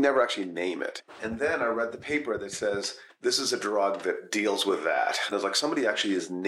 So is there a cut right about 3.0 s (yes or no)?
yes